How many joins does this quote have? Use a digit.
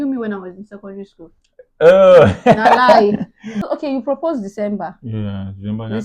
1